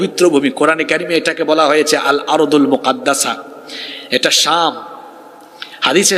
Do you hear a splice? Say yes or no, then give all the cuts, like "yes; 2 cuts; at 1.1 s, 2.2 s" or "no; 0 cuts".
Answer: no; 0 cuts